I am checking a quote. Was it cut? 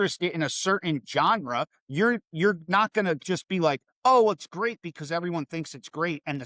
no; 0 cuts

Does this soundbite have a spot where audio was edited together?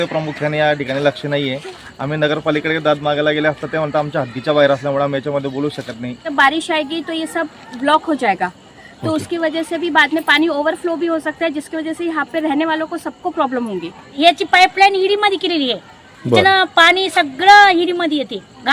yes; 2 cuts; at 6.3 s, 14.2 s

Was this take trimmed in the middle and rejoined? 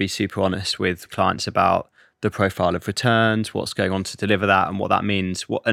yes; 2 cuts; at 1.1 s, 3.7 s

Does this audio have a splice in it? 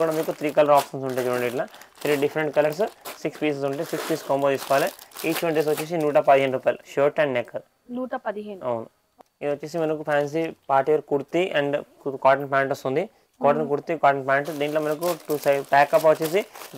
no; 0 cuts

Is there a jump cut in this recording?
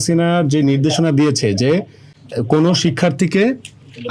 no; 0 cuts

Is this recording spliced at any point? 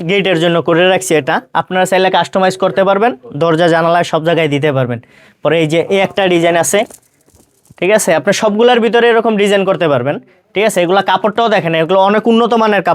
no; 0 cuts

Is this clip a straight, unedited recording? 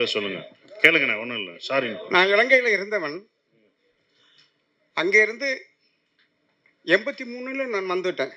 no; 1 cut; at 2.0 s

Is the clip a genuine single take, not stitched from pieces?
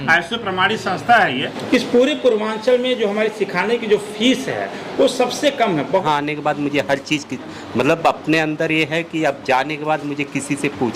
no; 2 cuts; at 1.5 s, 6.0 s

